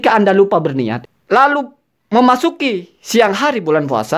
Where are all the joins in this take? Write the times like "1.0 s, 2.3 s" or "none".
1.0 s